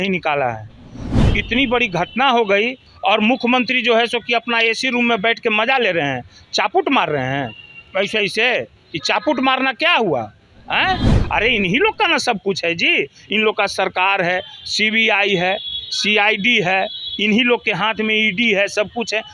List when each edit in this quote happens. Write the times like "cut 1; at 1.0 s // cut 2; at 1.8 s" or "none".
cut 1; at 1.1 s // cut 2; at 2.8 s // cut 3; at 11.1 s